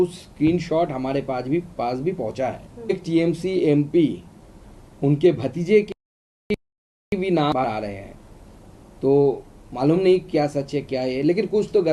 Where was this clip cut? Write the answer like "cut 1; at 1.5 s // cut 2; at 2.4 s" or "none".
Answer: cut 1; at 2.9 s

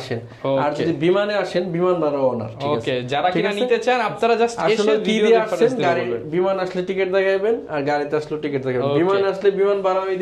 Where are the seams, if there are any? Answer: none

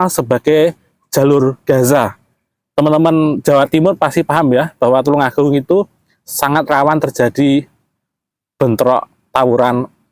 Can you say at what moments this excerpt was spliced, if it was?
none

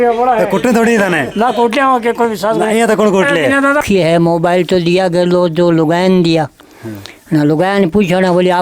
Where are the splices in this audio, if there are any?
cut 1; at 3.8 s

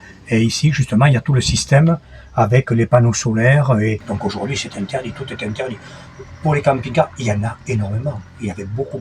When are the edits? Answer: cut 1; at 4.1 s

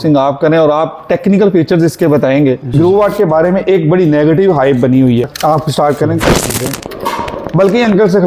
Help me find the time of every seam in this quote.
cut 1; at 2.7 s // cut 2; at 5.3 s

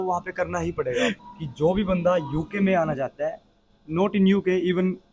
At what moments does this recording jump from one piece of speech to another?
cut 1; at 1.2 s

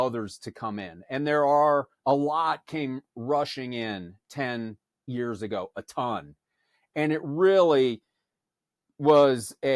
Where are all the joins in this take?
cut 1; at 5.1 s

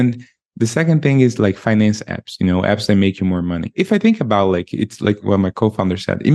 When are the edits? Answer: cut 1; at 3.7 s // cut 2; at 5.2 s

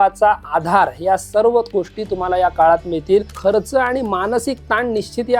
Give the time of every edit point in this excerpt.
cut 1; at 3.3 s

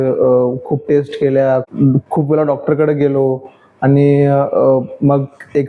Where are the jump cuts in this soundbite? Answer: cut 1; at 1.7 s

